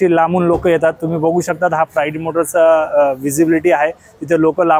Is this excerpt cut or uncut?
uncut